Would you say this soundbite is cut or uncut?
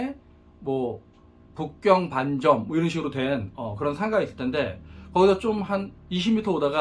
uncut